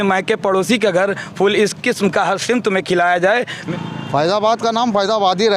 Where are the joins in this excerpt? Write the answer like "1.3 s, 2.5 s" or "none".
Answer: 3.6 s